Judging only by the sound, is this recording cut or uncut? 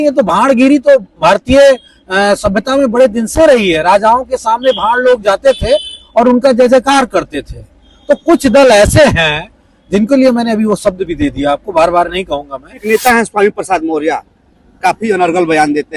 cut